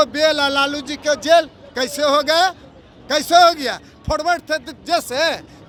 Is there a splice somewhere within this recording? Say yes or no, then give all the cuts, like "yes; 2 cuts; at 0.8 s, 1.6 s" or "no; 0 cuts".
no; 0 cuts